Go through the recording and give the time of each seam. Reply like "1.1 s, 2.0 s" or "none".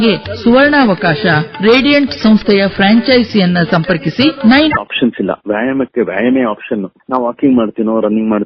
4.7 s

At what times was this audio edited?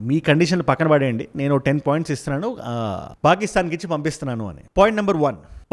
none

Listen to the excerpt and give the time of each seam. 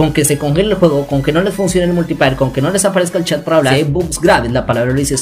3.7 s

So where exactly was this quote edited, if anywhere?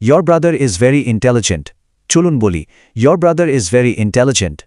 none

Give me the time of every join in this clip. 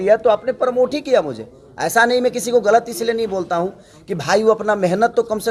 none

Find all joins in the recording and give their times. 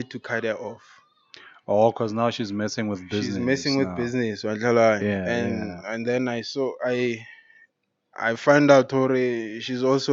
none

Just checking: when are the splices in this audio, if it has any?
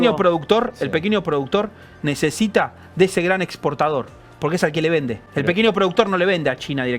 5.2 s

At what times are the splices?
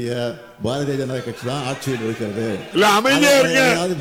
2.7 s

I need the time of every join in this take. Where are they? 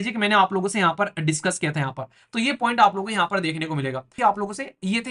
4.1 s

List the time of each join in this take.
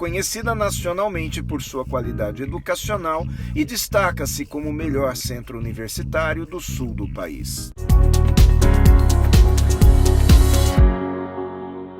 7.8 s

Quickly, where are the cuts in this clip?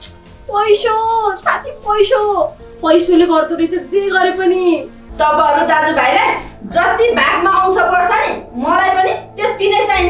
5.0 s

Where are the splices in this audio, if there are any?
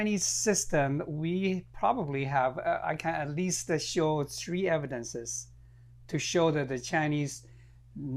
none

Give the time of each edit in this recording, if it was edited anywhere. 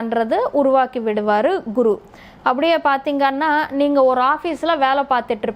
none

